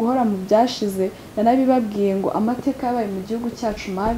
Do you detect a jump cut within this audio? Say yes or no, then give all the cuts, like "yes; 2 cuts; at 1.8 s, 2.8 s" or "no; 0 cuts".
no; 0 cuts